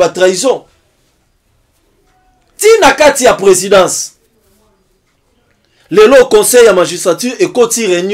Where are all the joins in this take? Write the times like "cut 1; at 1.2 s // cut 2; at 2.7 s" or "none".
none